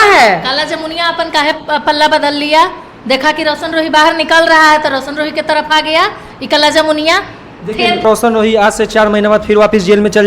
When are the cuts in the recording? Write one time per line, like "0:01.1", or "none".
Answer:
0:08.0